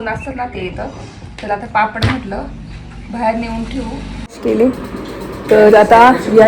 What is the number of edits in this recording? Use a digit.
1